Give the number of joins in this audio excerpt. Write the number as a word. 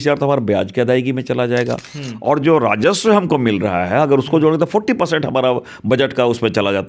zero